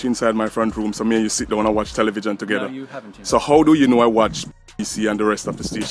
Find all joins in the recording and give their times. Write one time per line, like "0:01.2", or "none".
none